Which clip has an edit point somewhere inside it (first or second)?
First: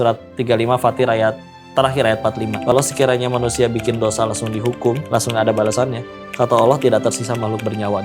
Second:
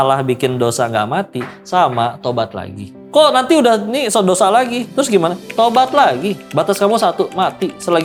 first